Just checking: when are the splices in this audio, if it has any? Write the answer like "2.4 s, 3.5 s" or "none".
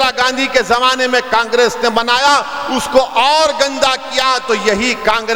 none